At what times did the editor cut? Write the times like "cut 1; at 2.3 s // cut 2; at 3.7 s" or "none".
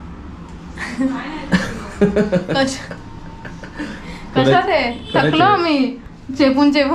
none

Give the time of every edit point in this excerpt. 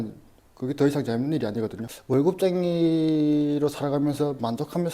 cut 1; at 1.9 s

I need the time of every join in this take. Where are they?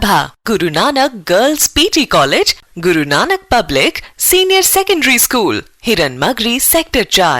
none

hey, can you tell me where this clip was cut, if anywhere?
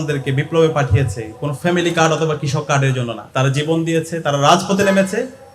cut 1; at 3.2 s

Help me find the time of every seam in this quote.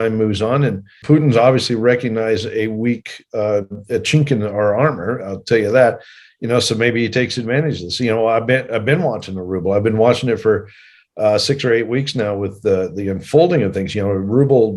cut 1; at 0.9 s

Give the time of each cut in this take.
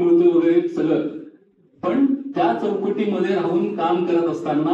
none

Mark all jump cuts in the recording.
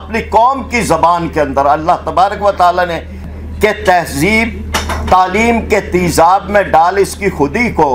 cut 1; at 3.2 s

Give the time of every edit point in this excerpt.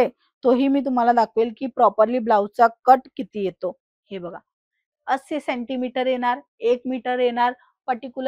none

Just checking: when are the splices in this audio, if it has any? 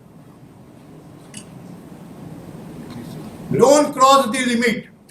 none

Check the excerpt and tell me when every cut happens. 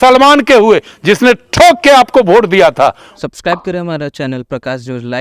cut 1; at 3.1 s

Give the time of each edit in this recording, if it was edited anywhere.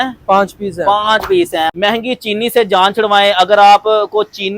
cut 1; at 1.7 s

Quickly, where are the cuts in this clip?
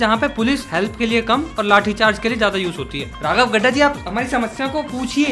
cut 1; at 3.1 s

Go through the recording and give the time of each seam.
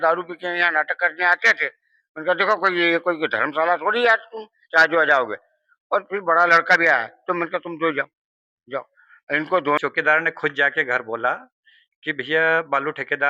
cut 1; at 9.8 s

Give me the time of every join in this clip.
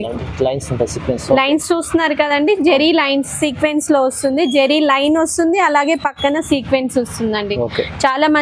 none

